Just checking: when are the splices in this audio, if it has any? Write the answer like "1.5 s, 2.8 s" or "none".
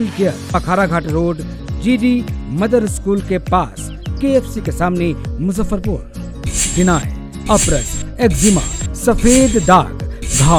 none